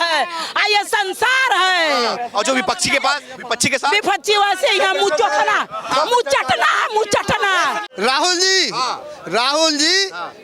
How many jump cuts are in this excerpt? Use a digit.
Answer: 1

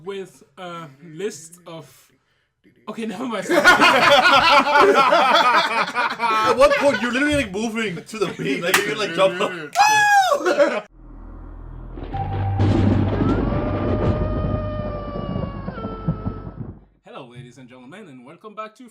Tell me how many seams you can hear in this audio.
1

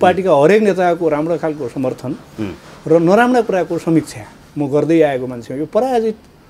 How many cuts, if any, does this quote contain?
0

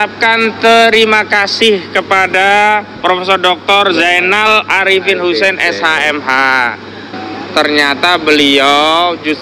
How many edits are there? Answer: 1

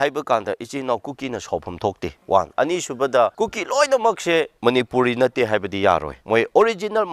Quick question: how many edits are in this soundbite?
4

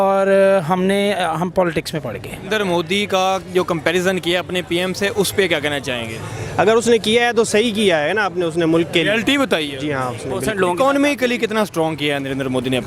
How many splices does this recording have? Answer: 2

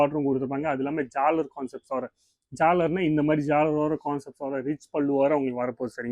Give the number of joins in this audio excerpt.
0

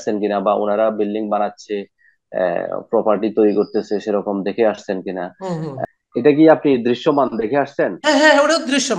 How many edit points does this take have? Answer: 1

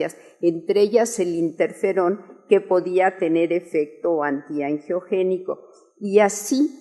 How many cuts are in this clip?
1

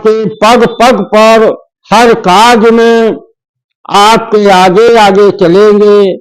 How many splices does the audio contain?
1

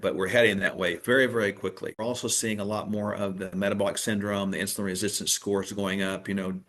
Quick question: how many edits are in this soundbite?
1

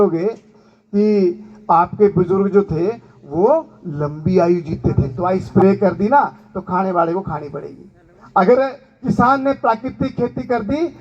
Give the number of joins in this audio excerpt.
1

